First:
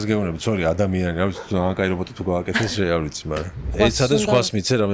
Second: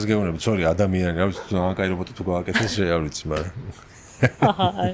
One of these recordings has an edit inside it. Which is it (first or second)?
first